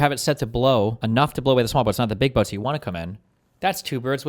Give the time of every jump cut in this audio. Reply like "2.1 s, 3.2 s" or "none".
1.0 s